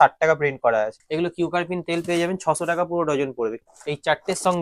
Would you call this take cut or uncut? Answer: cut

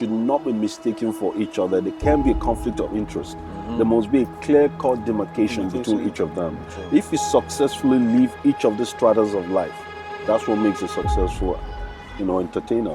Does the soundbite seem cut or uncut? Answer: uncut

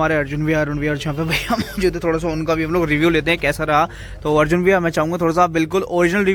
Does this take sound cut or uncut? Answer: uncut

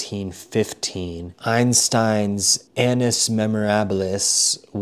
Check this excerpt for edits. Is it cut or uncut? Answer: cut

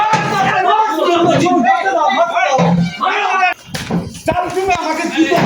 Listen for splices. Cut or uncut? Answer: cut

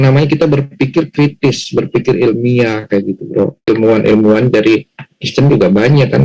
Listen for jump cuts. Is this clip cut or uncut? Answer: cut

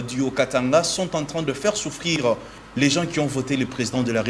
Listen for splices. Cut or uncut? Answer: uncut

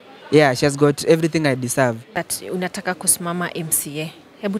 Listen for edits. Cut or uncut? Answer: cut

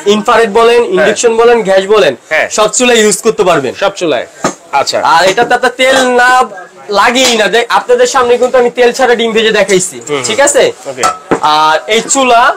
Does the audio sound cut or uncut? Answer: uncut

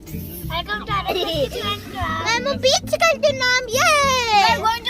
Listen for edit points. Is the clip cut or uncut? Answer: cut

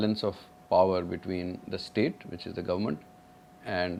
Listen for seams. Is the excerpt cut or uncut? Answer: uncut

